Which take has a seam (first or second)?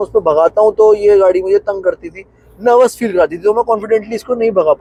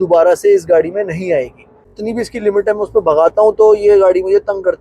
second